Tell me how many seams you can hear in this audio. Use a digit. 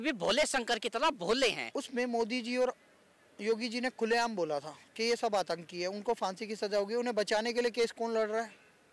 1